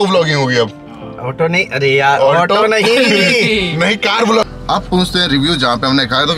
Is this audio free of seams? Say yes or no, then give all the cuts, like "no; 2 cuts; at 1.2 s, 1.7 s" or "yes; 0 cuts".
no; 1 cut; at 4.4 s